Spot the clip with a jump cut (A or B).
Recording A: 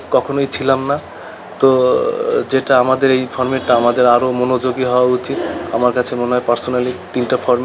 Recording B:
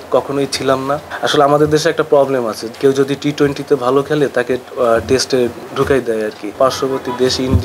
B